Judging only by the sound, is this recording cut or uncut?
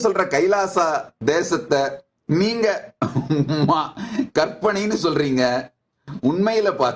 cut